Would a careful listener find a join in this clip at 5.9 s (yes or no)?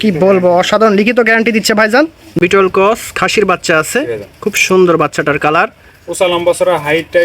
no